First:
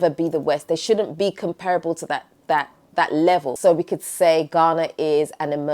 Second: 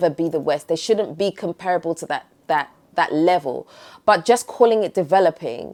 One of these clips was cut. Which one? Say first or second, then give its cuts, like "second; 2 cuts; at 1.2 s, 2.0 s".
first; 1 cut; at 3.5 s